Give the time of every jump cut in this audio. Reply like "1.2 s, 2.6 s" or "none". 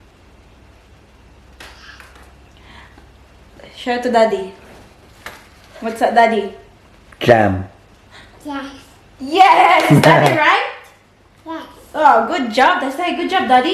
none